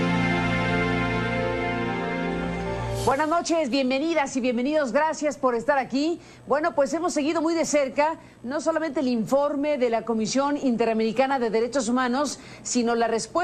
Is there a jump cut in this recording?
no; 0 cuts

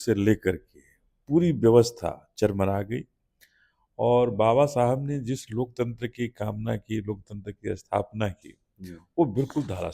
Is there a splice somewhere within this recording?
no; 0 cuts

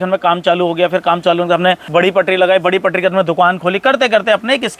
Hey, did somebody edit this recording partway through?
yes; 1 cut; at 1.8 s

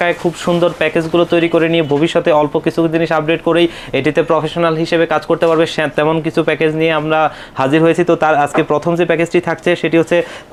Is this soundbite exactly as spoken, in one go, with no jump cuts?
yes; 0 cuts

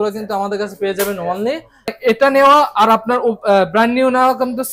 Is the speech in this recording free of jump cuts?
no; 1 cut; at 1.9 s

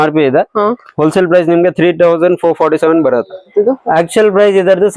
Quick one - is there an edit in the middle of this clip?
yes; 1 cut; at 3.5 s

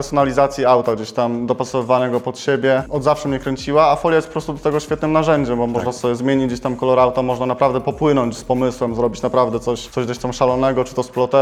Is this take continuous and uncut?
yes; 0 cuts

